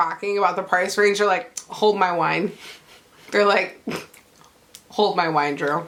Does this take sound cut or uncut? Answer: uncut